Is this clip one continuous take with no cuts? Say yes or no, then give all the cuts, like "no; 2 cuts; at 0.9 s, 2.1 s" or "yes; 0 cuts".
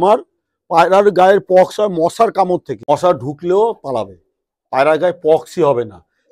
no; 1 cut; at 2.8 s